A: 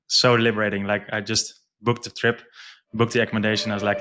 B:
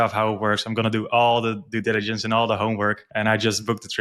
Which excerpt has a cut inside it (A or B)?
B